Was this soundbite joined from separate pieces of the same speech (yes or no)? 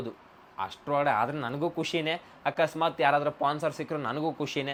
no